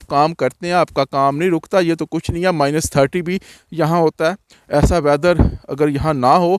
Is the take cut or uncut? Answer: cut